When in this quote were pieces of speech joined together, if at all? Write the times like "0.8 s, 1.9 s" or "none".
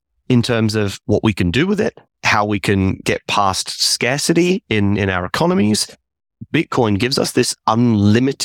1.0 s, 6.4 s